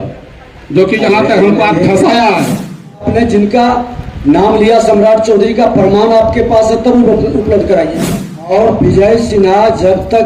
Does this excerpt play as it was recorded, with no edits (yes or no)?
no